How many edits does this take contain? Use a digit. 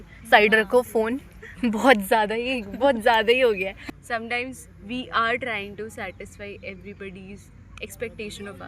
1